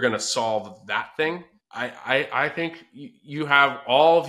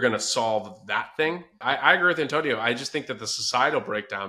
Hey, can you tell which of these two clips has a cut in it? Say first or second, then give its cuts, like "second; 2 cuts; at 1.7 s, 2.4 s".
second; 1 cut; at 1.6 s